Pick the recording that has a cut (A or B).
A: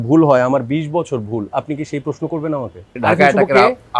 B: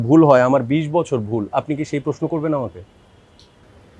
A